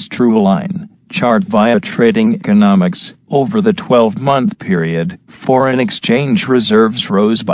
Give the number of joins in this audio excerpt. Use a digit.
1